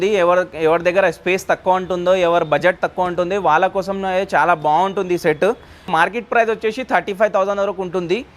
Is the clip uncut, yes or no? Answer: no